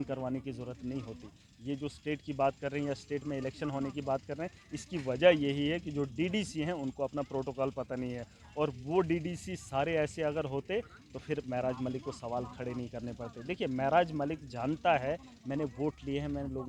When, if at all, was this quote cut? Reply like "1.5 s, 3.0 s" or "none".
none